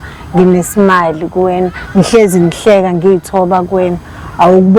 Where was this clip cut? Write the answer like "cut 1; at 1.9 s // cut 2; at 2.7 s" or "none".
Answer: none